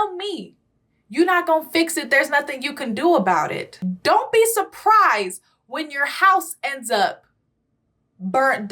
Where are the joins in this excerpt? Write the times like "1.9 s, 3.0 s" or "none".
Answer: 3.7 s